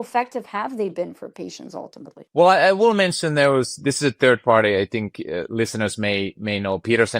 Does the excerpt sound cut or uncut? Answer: uncut